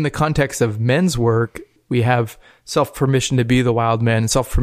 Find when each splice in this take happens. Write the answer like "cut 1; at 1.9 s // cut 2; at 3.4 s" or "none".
cut 1; at 1.7 s